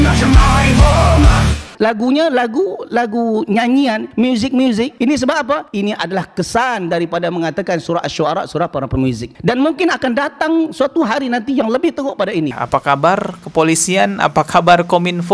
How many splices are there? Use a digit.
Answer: 2